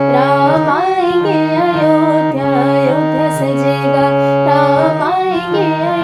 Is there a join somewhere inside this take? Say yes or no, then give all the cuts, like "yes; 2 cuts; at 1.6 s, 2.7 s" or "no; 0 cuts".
no; 0 cuts